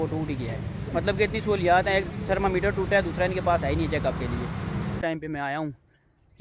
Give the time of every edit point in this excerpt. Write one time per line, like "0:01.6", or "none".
0:04.9